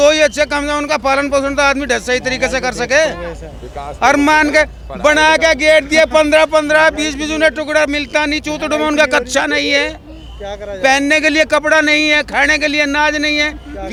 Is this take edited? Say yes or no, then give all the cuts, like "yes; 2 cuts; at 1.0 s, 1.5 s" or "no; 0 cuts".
no; 0 cuts